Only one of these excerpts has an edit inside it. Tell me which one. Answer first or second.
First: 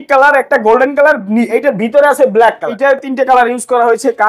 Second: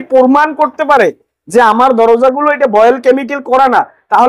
first